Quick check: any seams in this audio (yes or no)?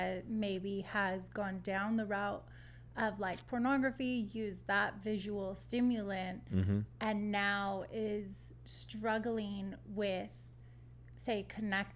no